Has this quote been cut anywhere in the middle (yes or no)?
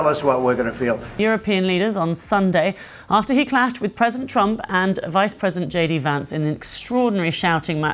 yes